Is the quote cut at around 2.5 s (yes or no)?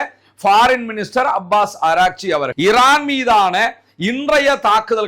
yes